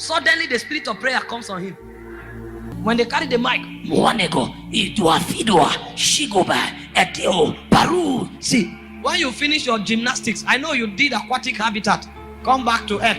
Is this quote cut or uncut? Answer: cut